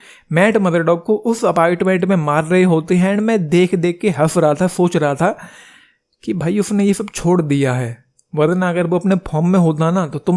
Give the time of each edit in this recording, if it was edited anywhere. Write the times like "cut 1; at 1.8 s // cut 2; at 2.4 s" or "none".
cut 1; at 1.4 s